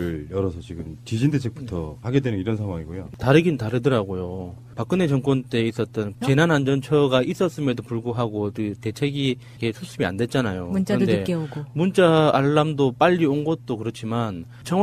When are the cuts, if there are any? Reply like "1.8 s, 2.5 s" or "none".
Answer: none